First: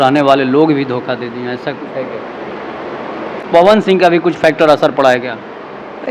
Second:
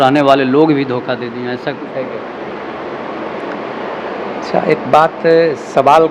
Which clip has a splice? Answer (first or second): first